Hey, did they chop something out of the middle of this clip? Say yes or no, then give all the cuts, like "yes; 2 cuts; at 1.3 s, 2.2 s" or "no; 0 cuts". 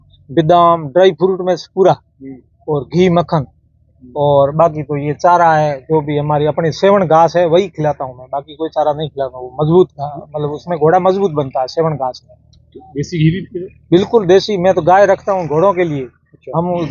no; 0 cuts